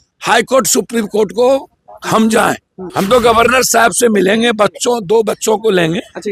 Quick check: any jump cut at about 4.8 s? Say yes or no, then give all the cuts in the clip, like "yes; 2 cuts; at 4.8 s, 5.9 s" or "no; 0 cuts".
no; 1 cut; at 2.8 s